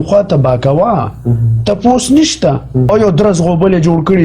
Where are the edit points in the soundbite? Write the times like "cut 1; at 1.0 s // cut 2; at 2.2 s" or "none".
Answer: cut 1; at 2.9 s